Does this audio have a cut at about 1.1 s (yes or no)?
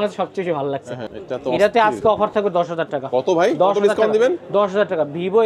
yes